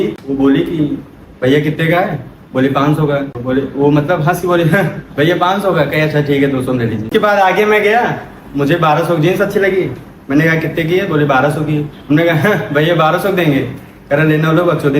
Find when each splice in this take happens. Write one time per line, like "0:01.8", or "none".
0:07.1